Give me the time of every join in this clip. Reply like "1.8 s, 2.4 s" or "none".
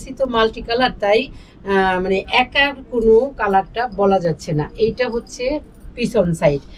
none